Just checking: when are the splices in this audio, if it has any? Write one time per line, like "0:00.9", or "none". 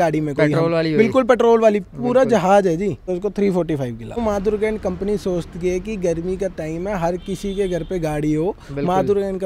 0:03.1
0:04.2